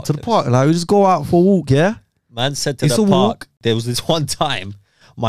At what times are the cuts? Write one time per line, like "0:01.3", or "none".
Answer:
0:03.5